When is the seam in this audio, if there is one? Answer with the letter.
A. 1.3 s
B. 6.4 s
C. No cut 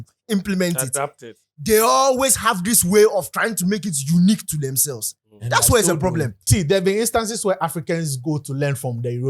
B